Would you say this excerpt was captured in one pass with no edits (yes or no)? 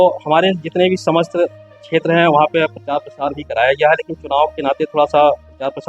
yes